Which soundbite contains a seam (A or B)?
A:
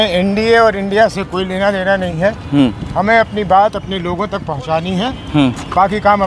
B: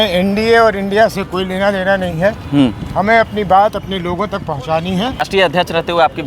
B